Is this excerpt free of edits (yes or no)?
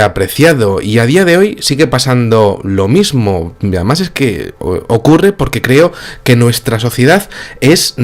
yes